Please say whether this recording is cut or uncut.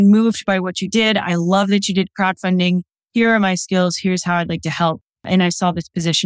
cut